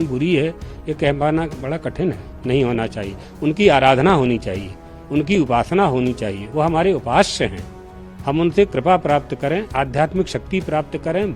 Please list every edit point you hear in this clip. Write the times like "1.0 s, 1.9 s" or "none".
2.3 s